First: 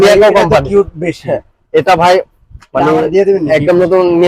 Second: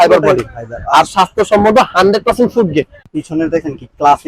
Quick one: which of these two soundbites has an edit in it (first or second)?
second